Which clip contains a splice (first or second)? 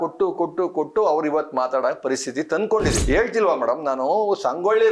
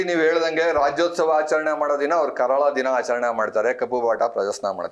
first